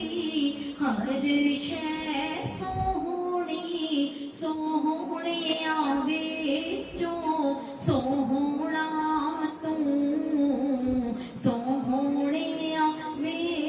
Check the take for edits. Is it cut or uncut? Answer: uncut